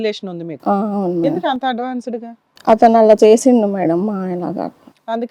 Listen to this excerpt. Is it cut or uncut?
uncut